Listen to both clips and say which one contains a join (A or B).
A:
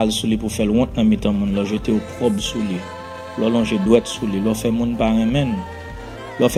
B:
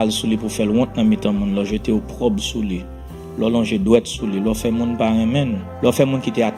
B